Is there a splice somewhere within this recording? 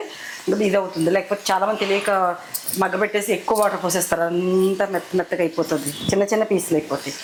no; 0 cuts

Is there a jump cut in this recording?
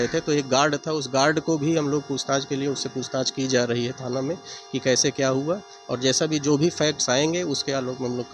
no; 0 cuts

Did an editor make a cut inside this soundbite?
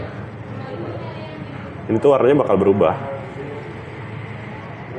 no; 0 cuts

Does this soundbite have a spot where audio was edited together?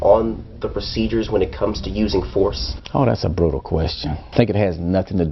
yes; 1 cut; at 4.3 s

